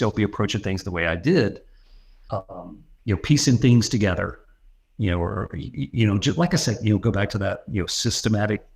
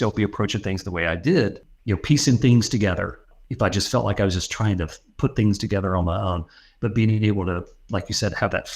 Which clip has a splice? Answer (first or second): second